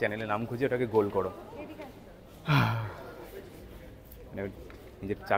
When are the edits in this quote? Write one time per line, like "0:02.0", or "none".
none

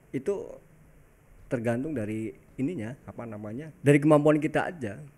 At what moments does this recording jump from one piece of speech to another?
0:03.7

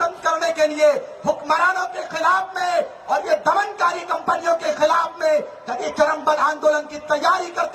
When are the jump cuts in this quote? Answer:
none

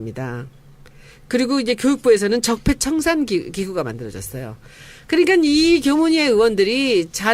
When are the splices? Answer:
none

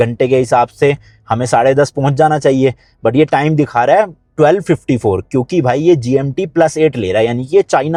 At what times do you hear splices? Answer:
none

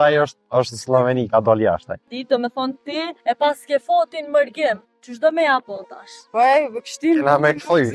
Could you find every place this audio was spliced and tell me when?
0:02.1
0:03.1

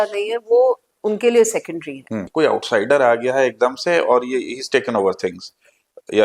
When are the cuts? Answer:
0:02.2

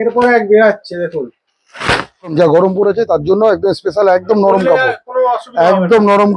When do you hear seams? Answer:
0:02.3

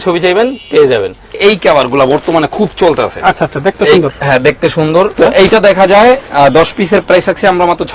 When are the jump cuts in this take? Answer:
0:01.4
0:05.1

